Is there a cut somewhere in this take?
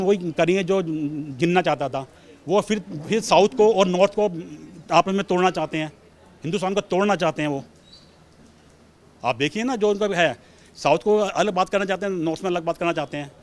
no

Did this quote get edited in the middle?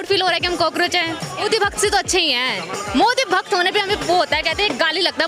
yes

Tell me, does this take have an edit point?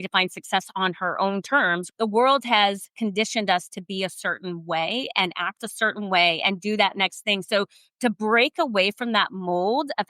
yes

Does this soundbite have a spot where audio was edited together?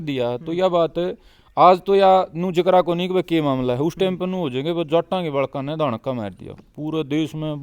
no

